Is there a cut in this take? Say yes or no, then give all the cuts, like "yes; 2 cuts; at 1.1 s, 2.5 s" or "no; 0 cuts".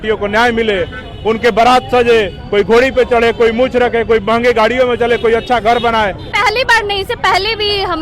yes; 1 cut; at 6.2 s